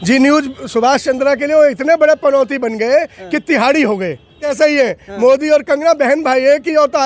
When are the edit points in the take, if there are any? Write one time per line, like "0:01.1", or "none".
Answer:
0:04.5